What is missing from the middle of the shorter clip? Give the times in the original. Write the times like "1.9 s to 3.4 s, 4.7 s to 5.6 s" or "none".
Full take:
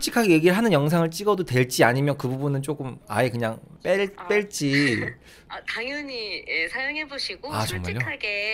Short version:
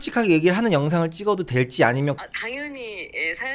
2.2 s to 5.5 s